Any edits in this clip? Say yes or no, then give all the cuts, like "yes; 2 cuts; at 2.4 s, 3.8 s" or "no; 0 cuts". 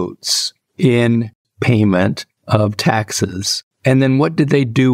yes; 2 cuts; at 1.4 s, 3.6 s